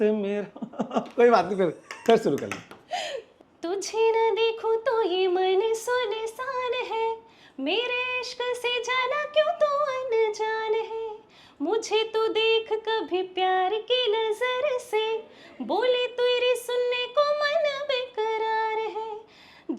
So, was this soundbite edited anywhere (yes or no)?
no